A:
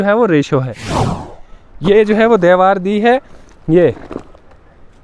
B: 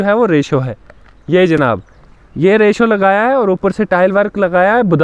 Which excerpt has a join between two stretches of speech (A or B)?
A